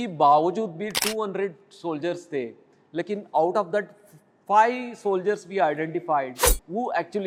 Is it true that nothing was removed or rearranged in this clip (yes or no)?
yes